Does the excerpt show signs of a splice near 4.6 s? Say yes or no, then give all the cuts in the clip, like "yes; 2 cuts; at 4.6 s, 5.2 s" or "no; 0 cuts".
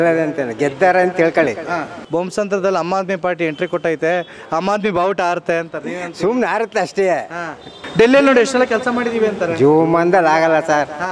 no; 2 cuts; at 2.0 s, 7.8 s